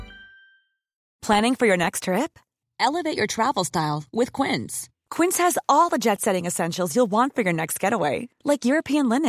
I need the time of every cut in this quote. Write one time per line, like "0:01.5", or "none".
none